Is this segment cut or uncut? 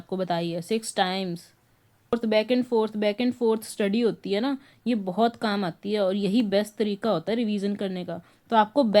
cut